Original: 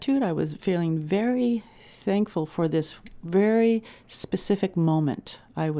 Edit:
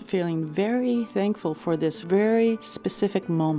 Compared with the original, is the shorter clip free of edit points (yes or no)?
no